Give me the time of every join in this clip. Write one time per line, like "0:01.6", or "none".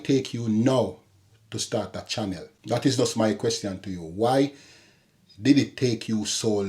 0:02.5